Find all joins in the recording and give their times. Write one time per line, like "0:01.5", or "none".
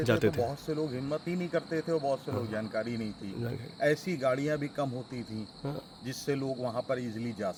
none